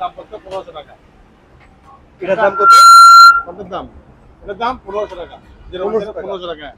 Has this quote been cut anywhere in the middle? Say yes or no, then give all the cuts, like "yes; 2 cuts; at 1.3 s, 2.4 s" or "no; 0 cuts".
no; 0 cuts